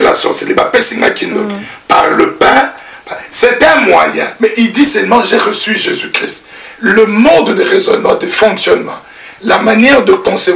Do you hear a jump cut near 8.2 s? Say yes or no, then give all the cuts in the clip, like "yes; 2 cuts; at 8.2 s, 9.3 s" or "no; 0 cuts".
no; 1 cut; at 4.3 s